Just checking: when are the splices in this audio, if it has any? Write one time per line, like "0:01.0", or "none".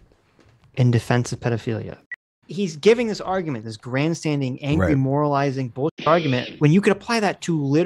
0:02.0